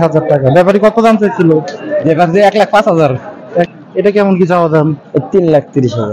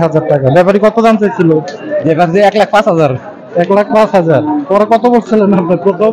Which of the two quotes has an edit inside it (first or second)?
first